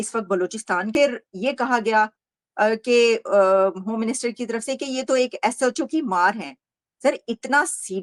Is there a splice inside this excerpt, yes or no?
no